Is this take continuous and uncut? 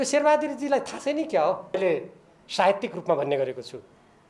no; 1 cut; at 1.8 s

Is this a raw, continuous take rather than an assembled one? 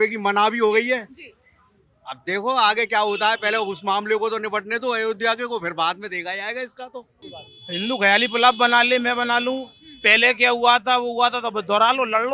no; 1 cut; at 7.3 s

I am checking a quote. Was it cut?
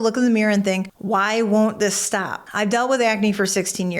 yes; 1 cut; at 0.9 s

